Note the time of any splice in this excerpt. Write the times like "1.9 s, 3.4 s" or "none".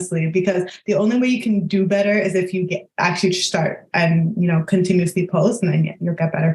none